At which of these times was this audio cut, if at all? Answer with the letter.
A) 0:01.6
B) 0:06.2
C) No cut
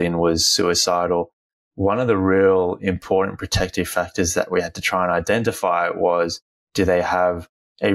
C